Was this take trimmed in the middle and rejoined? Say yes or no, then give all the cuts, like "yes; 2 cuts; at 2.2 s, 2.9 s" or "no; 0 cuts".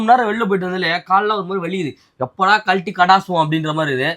no; 0 cuts